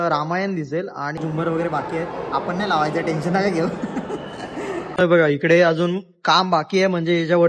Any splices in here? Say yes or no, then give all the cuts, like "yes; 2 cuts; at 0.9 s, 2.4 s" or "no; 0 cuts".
yes; 2 cuts; at 1.2 s, 5.0 s